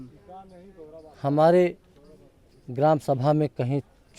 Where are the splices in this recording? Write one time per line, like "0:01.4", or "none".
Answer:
none